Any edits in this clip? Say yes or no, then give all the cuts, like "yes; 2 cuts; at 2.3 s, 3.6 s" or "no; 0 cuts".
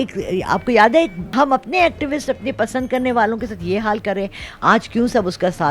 no; 0 cuts